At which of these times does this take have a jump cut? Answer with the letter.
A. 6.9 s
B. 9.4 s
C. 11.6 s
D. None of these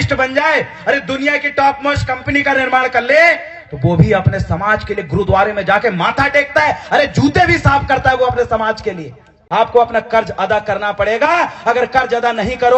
B